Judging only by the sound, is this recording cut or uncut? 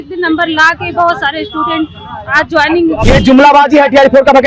cut